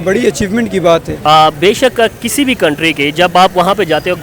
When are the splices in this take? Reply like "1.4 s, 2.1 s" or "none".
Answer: 1.1 s